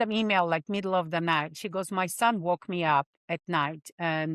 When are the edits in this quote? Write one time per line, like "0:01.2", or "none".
none